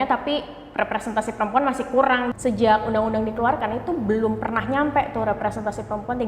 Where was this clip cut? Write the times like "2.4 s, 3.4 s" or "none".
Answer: 2.3 s